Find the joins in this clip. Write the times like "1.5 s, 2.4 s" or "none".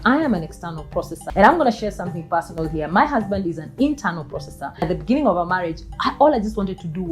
1.2 s, 4.8 s